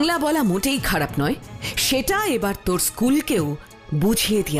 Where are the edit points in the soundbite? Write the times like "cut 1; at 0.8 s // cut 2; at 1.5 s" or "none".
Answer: none